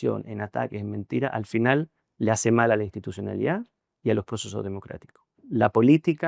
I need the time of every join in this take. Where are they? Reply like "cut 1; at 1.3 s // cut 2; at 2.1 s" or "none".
cut 1; at 5.4 s